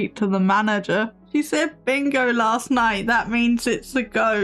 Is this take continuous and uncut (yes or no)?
no